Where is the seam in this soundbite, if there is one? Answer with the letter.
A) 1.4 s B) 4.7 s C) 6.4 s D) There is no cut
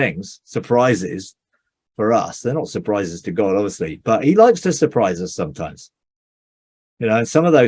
D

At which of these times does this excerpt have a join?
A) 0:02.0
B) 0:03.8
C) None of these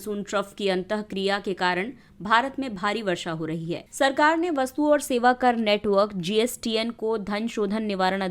B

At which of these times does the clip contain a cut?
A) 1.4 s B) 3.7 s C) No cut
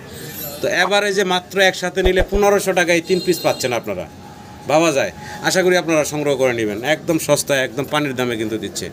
C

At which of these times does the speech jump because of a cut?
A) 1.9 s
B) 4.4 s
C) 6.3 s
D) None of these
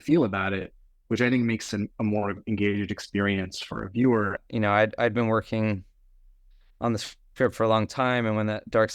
B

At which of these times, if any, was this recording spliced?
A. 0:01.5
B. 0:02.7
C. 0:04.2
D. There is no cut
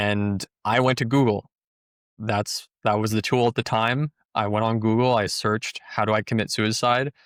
D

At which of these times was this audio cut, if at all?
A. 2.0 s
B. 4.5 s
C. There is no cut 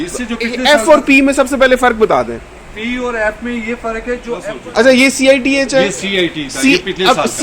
B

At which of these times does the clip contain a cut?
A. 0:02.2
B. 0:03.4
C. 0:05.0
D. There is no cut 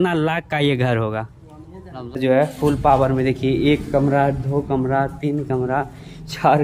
A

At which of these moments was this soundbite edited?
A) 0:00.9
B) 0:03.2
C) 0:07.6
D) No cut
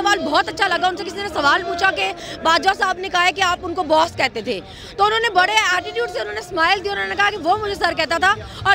D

